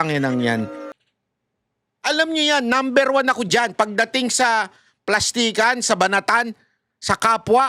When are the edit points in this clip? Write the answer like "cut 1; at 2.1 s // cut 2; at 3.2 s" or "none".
cut 1; at 0.9 s